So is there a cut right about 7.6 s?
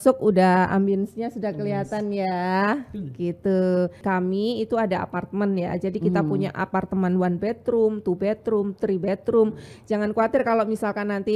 no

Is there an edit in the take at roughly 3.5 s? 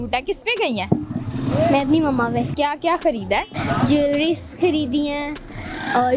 yes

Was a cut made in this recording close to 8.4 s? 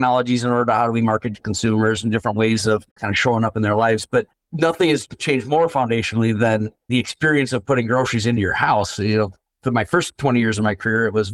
yes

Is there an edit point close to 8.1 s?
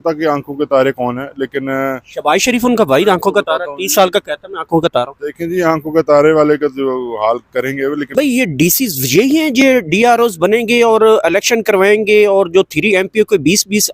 yes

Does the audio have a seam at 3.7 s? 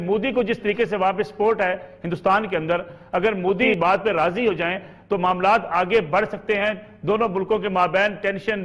yes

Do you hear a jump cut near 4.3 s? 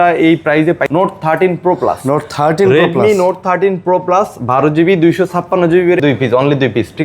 no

